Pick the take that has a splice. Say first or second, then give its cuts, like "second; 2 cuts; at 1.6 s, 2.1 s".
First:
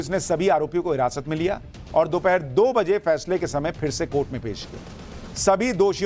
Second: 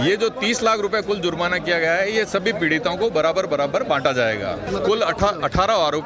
first; 1 cut; at 3.8 s